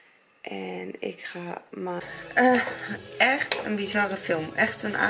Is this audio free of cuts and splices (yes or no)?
no